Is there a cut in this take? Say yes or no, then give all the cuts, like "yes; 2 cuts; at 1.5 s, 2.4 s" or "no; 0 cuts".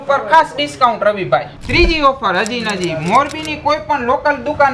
yes; 1 cut; at 1.5 s